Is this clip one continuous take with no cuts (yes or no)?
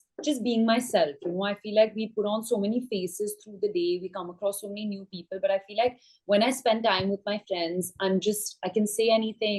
yes